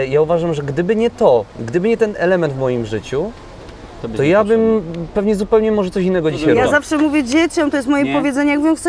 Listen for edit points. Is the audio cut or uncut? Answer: cut